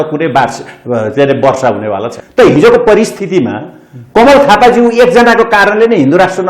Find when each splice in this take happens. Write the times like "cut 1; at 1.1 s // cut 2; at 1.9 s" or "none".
cut 1; at 2.1 s